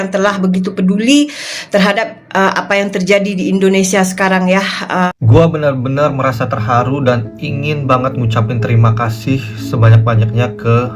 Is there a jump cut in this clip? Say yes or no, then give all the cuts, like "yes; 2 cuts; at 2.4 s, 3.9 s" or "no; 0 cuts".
yes; 1 cut; at 5.1 s